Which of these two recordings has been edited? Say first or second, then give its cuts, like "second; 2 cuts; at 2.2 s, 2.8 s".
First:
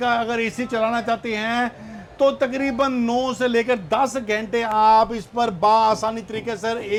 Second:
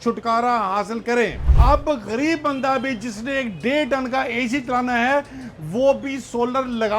second; 1 cut; at 1.5 s